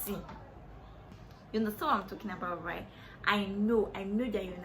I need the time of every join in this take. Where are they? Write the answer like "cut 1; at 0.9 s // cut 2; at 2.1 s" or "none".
cut 1; at 1.2 s